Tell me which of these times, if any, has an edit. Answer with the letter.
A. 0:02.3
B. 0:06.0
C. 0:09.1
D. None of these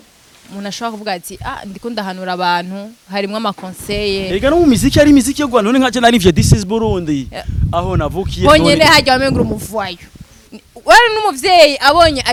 D